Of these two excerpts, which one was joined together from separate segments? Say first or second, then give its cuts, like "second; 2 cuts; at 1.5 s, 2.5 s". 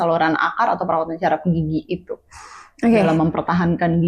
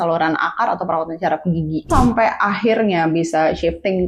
second; 1 cut; at 1.9 s